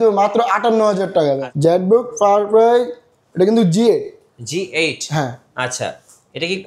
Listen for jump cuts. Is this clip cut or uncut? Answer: cut